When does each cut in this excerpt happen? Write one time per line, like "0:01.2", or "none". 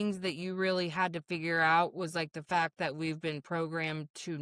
none